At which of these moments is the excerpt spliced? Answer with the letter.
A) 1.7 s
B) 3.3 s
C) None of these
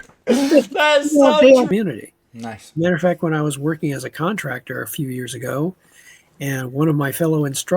A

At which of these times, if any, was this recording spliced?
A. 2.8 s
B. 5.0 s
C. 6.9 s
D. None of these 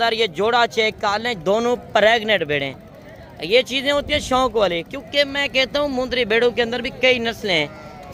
D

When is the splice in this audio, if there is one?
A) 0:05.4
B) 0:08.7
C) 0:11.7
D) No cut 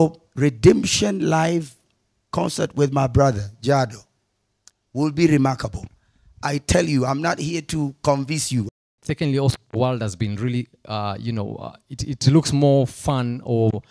B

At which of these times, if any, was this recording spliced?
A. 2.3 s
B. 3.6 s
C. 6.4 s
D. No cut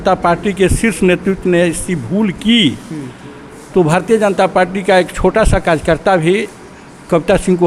D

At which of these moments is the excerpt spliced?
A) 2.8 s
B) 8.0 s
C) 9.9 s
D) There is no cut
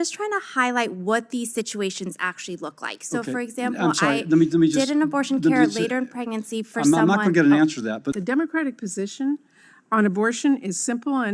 B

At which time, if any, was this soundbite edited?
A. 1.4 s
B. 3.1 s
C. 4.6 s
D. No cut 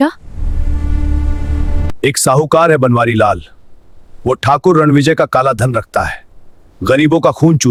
D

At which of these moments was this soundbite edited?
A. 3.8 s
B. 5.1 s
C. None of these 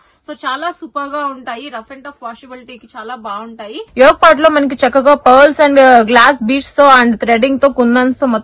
A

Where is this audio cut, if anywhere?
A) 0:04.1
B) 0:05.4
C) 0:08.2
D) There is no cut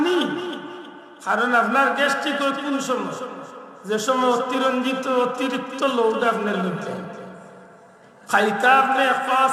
D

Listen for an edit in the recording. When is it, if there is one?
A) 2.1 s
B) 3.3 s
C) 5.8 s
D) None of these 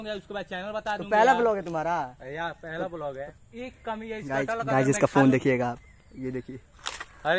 B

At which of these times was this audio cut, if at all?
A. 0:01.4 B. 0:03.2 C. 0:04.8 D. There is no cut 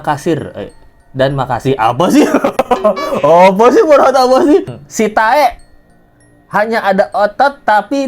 C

